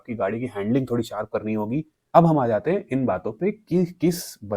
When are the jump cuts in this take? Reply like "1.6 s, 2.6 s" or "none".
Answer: 2.0 s